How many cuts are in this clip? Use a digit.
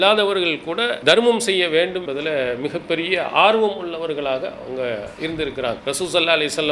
3